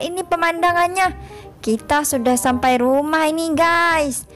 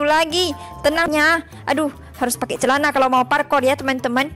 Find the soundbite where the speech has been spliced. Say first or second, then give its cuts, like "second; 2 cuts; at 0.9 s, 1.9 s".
second; 1 cut; at 1.1 s